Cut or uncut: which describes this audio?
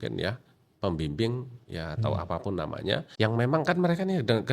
cut